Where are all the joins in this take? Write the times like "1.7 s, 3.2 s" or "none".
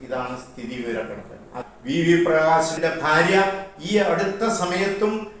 1.6 s, 2.8 s